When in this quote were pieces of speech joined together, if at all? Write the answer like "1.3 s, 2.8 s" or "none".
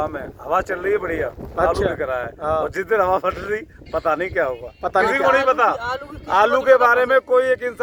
none